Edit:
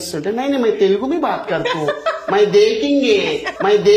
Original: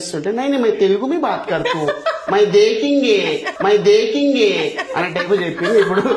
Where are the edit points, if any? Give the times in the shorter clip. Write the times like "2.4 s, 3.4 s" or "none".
none